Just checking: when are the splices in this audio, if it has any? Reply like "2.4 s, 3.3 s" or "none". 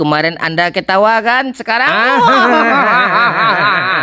none